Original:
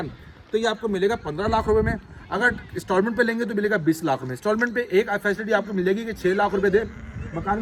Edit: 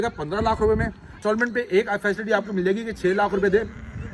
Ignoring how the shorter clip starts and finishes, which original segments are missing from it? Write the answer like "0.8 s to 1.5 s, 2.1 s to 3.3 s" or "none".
2.2 s to 4.3 s